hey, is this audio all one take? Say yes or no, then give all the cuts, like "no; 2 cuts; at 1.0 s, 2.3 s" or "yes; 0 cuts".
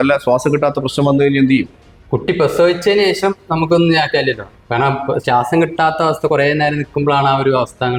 yes; 0 cuts